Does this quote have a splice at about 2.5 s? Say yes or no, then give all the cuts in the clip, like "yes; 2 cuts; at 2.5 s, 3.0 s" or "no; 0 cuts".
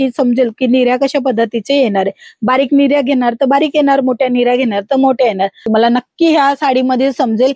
no; 1 cut; at 5.6 s